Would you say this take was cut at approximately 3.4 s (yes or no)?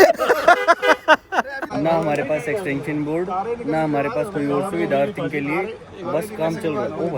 no